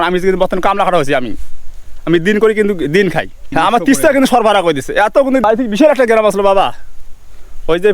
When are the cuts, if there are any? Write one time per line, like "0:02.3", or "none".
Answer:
0:03.5
0:05.2